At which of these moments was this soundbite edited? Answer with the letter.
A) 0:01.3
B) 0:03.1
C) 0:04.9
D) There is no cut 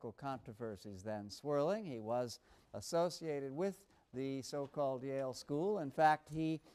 D